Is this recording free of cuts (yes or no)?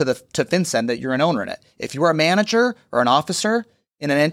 yes